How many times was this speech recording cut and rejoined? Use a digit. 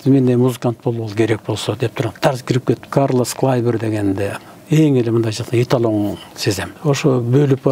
2